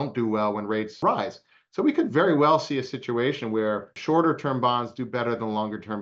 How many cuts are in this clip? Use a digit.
2